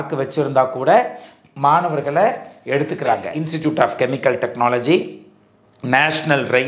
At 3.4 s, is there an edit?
yes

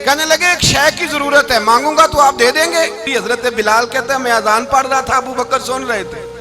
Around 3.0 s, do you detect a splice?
yes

